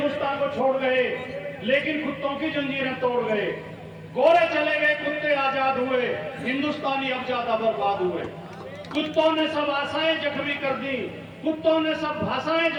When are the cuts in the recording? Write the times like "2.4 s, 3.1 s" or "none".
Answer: none